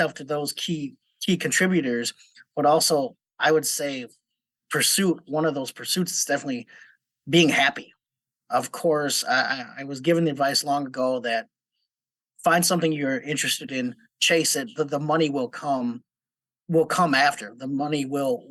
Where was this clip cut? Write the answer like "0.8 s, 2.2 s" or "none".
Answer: none